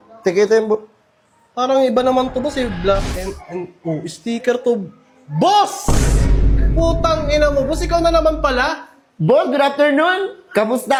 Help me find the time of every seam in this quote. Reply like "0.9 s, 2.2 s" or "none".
none